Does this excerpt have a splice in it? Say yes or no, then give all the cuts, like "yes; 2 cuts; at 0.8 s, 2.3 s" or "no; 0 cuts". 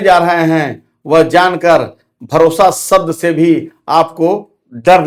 no; 0 cuts